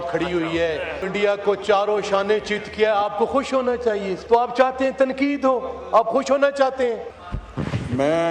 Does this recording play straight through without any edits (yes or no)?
no